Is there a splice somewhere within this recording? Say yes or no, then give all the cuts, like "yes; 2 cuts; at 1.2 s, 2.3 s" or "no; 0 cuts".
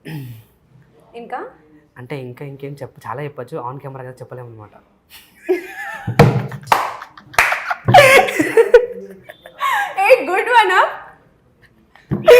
no; 0 cuts